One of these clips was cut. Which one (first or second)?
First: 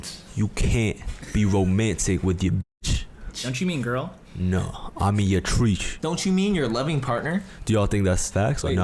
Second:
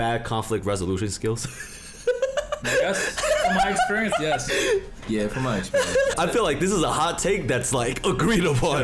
second